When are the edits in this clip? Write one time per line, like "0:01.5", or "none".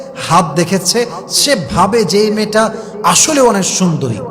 none